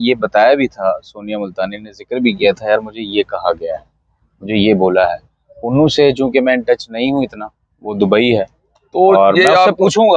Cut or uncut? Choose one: uncut